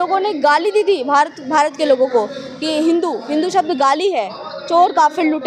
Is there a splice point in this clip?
no; 0 cuts

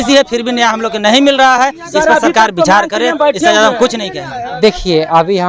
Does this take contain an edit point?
no; 0 cuts

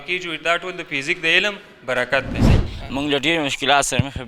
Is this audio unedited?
no; 1 cut; at 2.6 s

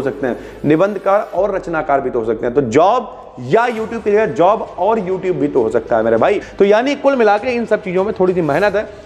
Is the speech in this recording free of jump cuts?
no; 1 cut; at 6.5 s

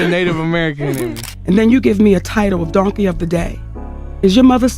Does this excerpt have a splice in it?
yes; 1 cut; at 1.3 s

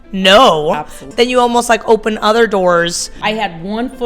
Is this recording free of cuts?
no; 2 cuts; at 1.0 s, 3.2 s

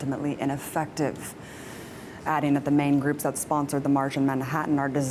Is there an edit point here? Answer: no; 0 cuts

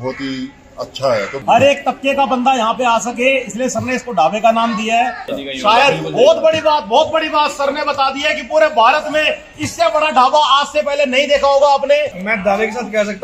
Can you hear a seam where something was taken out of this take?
yes; 3 cuts; at 1.4 s, 5.3 s, 12.2 s

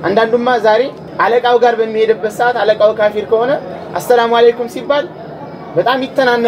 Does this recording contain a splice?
yes; 1 cut; at 1.0 s

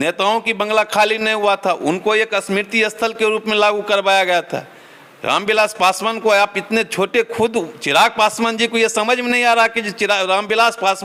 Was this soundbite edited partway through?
no; 0 cuts

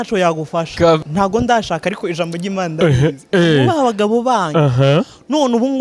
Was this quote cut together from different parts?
yes; 1 cut; at 1.0 s

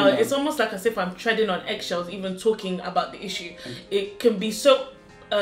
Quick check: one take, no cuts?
yes; 0 cuts

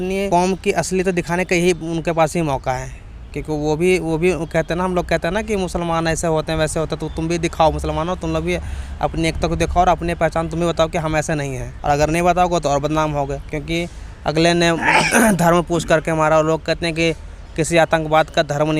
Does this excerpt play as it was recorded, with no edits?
yes; 0 cuts

